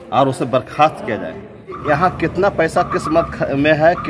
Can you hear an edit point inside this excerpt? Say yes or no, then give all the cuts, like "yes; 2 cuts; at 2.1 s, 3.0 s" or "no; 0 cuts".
yes; 1 cut; at 1.8 s